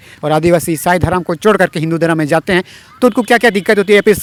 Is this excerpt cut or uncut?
uncut